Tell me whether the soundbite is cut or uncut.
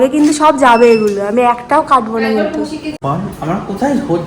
cut